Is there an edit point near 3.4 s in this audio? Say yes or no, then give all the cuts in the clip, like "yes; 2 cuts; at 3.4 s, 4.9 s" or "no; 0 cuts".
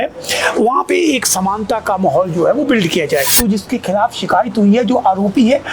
yes; 1 cut; at 3.4 s